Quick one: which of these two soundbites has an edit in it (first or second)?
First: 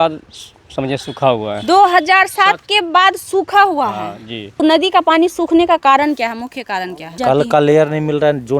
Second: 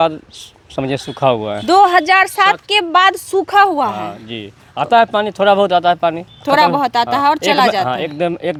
first